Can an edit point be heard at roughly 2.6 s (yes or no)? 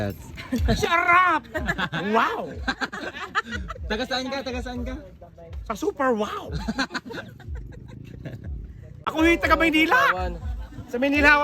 no